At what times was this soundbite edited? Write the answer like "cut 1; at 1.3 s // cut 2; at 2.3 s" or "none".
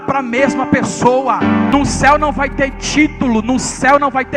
cut 1; at 1.7 s